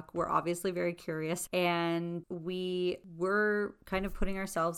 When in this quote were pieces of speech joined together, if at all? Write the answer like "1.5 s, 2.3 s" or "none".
1.4 s, 2.3 s, 3.1 s